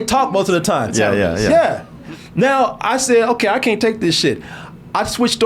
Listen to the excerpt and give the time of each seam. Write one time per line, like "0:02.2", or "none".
0:02.2